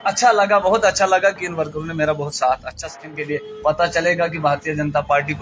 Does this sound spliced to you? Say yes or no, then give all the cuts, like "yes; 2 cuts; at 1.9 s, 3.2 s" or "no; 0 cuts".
yes; 1 cut; at 2.9 s